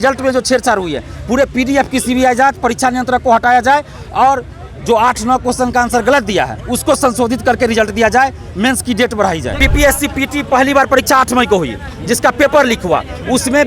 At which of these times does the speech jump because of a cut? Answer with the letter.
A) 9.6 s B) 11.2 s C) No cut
A